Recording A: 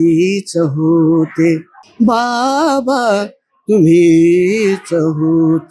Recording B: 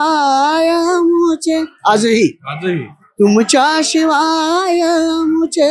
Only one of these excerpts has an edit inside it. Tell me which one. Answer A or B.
A